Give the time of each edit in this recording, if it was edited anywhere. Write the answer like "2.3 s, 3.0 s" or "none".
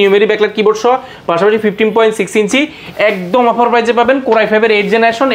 none

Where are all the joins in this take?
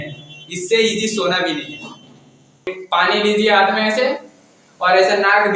2.7 s

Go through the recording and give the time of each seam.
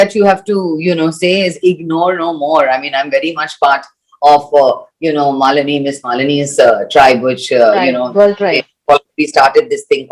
none

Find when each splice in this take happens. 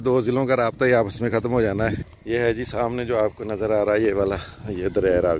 2.0 s

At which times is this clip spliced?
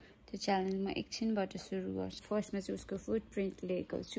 2.2 s

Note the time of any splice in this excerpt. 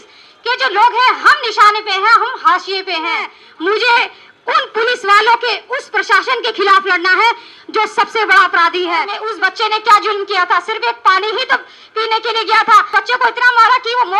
3.4 s, 9.2 s, 12.9 s

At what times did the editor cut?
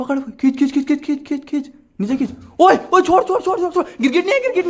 none

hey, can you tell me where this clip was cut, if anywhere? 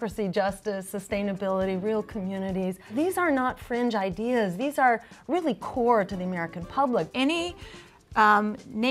2.9 s, 7.1 s

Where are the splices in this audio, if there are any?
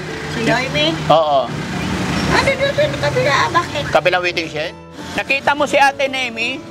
4.9 s

